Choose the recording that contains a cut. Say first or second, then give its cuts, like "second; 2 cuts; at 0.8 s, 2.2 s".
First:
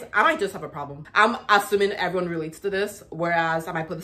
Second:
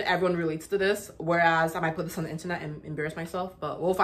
first; 1 cut; at 1.0 s